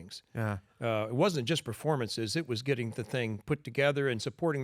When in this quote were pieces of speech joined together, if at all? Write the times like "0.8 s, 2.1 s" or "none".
none